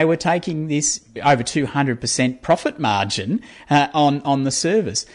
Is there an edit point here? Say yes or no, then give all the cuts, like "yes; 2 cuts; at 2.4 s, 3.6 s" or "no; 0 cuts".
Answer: yes; 1 cut; at 1.0 s